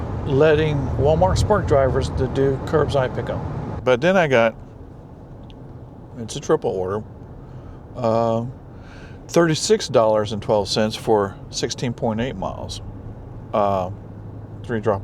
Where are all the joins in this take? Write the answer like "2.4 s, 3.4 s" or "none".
3.7 s